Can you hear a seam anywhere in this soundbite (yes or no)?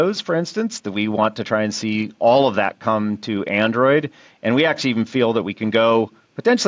no